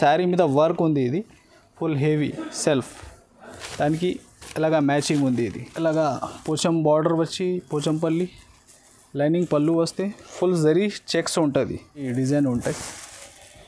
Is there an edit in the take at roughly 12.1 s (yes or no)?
yes